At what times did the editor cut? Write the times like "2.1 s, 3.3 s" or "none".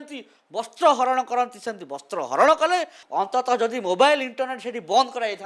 3.0 s